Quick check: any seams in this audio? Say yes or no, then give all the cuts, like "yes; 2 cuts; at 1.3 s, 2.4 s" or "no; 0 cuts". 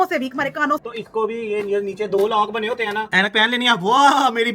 yes; 2 cuts; at 0.8 s, 3.1 s